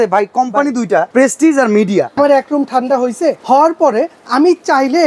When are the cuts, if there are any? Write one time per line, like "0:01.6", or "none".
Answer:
0:01.1
0:02.2
0:03.4